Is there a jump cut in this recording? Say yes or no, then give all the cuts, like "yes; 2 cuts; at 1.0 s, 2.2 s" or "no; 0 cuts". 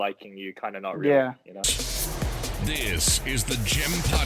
yes; 1 cut; at 1.5 s